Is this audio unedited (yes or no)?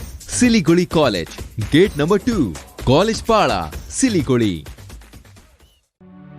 yes